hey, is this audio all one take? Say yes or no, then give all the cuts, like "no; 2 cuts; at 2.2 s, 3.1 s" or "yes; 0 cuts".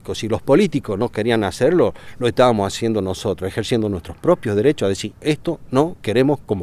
yes; 0 cuts